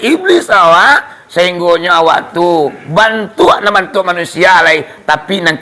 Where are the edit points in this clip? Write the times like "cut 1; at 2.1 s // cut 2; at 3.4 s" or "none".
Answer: none